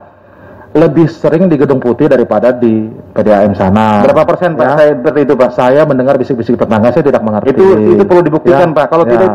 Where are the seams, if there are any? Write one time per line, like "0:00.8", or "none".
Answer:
none